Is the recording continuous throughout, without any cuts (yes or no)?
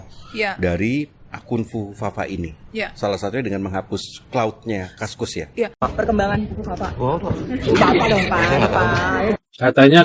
no